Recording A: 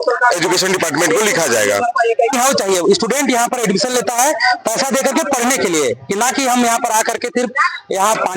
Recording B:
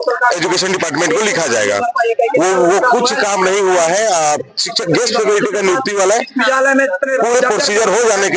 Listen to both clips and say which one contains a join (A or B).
A